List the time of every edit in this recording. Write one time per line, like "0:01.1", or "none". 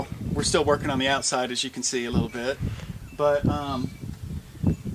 none

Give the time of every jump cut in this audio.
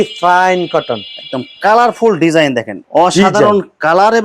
0:02.7

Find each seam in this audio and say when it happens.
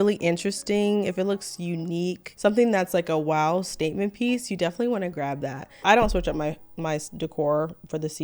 0:02.3
0:05.6

